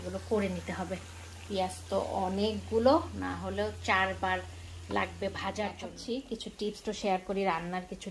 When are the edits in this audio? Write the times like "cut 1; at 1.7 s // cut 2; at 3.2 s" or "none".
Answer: cut 1; at 5.9 s